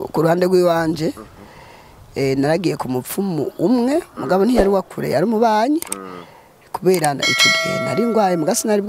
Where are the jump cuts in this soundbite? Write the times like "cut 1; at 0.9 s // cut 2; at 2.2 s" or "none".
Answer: none